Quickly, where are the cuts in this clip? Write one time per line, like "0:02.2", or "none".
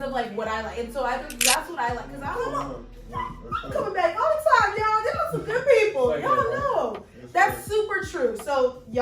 0:02.4